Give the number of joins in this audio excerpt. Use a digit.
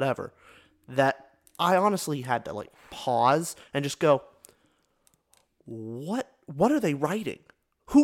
0